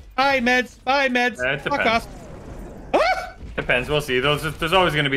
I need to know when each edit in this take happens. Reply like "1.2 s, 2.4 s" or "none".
none